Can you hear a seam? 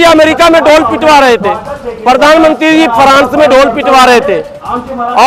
no; 0 cuts

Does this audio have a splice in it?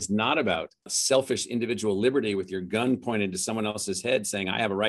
yes; 1 cut; at 1.0 s

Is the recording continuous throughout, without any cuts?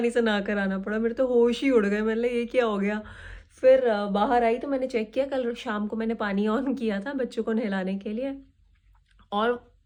yes; 0 cuts

